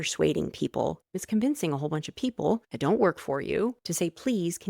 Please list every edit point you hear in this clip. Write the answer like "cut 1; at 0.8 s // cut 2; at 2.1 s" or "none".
cut 1; at 1.1 s // cut 2; at 2.7 s // cut 3; at 3.8 s